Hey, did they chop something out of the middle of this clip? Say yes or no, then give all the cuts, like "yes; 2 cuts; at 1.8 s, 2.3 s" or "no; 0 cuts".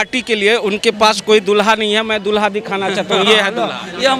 no; 0 cuts